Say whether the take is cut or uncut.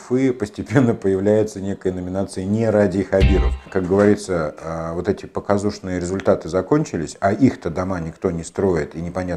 cut